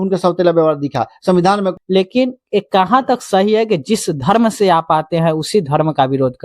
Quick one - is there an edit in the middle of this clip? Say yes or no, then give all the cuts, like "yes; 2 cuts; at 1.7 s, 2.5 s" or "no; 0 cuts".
yes; 1 cut; at 1.7 s